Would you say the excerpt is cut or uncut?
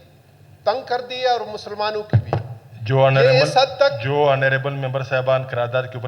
uncut